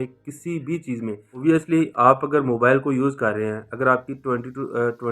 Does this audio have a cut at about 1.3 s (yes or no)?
yes